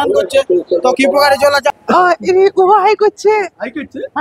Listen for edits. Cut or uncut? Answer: cut